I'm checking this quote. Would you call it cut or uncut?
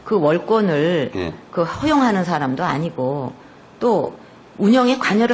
uncut